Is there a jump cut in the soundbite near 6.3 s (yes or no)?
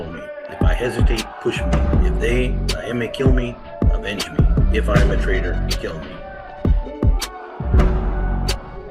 yes